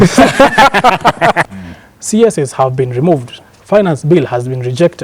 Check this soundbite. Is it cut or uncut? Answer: cut